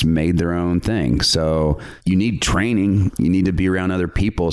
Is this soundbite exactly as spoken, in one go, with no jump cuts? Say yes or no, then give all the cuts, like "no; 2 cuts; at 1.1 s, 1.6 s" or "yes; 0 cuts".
no; 1 cut; at 1.9 s